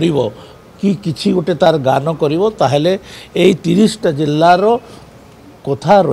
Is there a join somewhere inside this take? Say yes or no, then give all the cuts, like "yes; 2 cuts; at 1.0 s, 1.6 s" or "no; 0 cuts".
no; 0 cuts